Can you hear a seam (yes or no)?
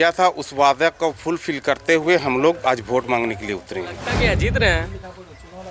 yes